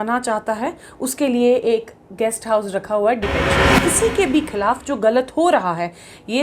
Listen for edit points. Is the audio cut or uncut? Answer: cut